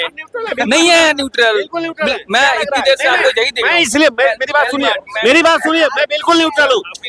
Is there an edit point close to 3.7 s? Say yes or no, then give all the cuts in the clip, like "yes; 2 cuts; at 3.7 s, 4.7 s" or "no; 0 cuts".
no; 0 cuts